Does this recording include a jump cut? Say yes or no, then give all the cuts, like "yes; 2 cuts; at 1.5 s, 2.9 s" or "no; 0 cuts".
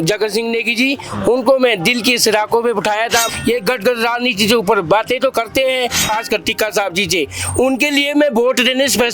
yes; 2 cuts; at 3.3 s, 6.1 s